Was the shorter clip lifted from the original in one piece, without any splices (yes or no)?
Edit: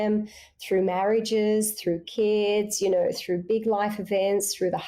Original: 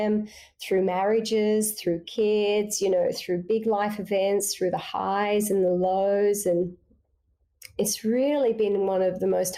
yes